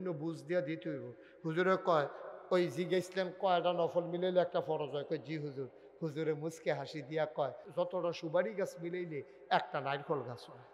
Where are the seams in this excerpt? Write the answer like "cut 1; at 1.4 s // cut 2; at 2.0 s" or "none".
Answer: cut 1; at 7.6 s

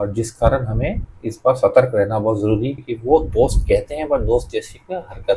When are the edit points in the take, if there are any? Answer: cut 1; at 2.8 s

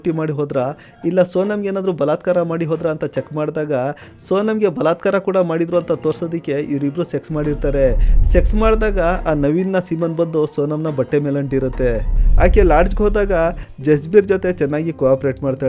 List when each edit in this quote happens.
cut 1; at 12.2 s

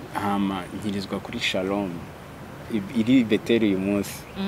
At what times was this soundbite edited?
none

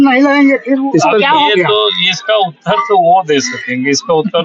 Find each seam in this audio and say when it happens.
none

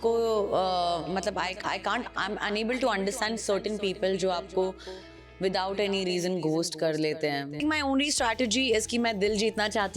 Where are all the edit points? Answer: cut 1; at 7.6 s

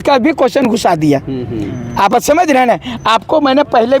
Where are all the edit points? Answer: none

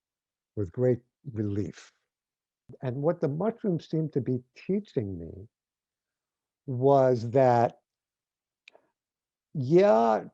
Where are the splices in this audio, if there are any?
cut 1; at 2.7 s

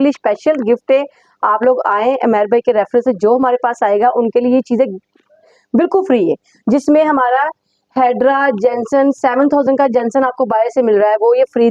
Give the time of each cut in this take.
none

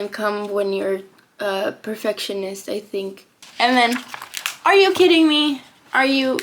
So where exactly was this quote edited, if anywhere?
cut 1; at 3.5 s

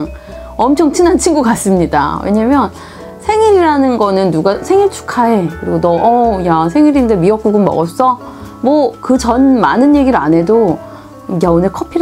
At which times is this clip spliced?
none

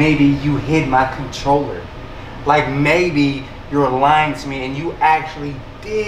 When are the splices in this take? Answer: none

